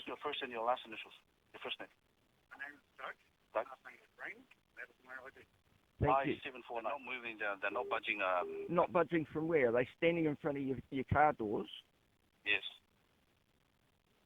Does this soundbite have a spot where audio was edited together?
yes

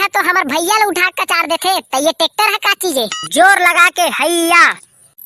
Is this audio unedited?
no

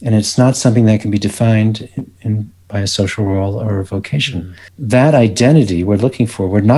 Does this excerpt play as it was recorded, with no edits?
no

